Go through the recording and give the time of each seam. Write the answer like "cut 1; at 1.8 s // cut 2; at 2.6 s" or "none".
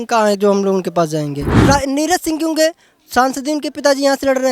cut 1; at 1.6 s